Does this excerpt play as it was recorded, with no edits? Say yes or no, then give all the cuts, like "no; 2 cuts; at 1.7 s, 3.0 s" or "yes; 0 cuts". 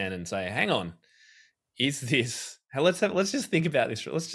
yes; 0 cuts